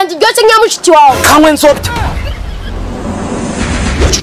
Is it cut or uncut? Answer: cut